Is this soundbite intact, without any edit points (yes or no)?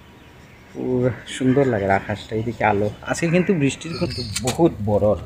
no